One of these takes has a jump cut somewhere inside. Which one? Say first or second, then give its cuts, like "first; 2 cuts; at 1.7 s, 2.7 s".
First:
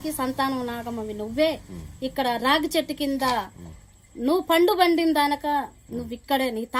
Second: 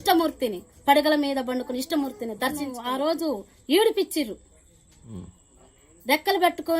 second; 1 cut; at 2.8 s